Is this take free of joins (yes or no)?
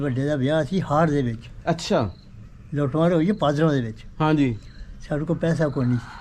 yes